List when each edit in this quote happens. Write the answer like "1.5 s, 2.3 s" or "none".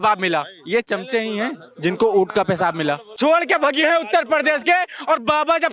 3.1 s